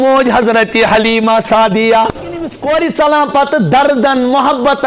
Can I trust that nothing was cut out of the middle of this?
no; 1 cut; at 2.6 s

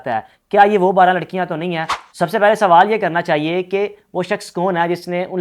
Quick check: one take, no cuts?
no; 1 cut; at 2.0 s

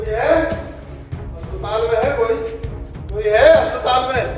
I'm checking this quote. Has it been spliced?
no; 0 cuts

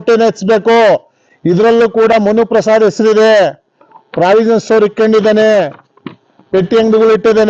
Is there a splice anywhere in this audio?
no; 0 cuts

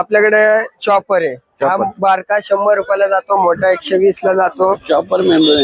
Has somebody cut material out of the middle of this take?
no; 0 cuts

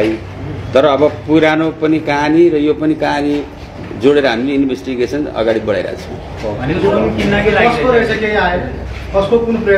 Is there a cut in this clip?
no; 0 cuts

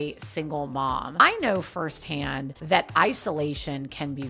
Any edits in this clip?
no; 0 cuts

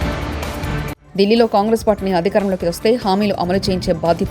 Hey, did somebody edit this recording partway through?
yes; 1 cut; at 0.9 s

